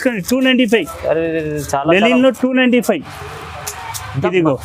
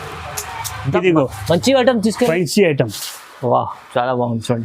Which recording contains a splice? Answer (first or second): second